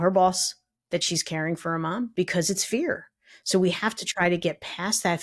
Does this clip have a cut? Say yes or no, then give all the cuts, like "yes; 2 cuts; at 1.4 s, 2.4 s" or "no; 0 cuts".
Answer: yes; 1 cut; at 2.1 s